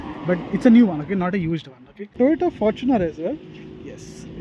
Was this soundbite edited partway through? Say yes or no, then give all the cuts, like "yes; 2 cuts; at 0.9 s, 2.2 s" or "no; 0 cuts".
yes; 1 cut; at 2.1 s